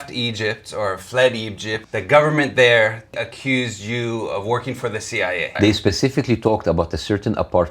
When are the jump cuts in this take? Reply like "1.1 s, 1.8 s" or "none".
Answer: 1.7 s, 3.1 s, 5.5 s